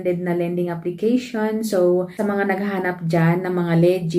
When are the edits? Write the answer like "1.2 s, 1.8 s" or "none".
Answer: 2.1 s